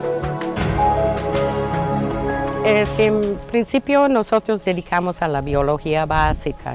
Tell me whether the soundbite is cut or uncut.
cut